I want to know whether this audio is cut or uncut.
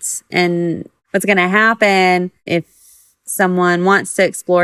cut